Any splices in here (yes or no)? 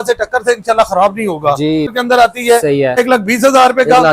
yes